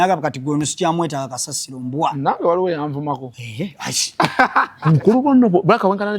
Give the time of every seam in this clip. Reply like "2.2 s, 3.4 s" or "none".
4.7 s